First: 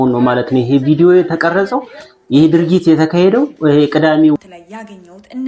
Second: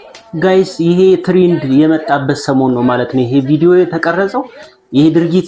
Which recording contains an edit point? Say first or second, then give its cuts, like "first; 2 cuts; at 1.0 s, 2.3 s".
first; 1 cut; at 4.4 s